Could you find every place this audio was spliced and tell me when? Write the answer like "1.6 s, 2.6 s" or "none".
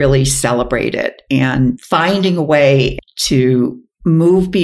2.9 s

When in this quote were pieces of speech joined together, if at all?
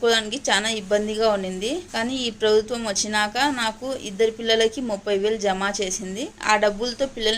1.9 s, 6.3 s

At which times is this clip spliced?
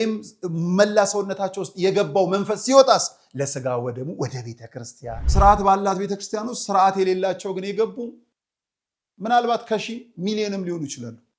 5.2 s

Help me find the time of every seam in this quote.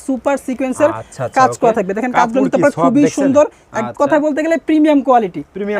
none

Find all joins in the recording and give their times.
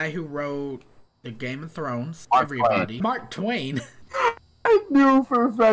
2.2 s, 3.0 s, 4.0 s

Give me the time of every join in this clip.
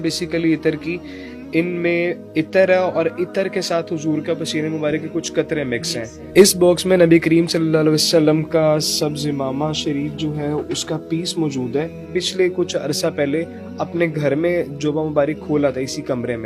6.1 s, 12.0 s

